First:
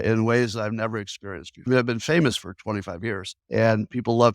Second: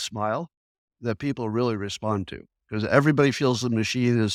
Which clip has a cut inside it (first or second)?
first